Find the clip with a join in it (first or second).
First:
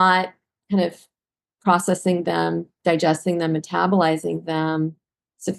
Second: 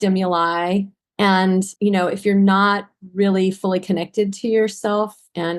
second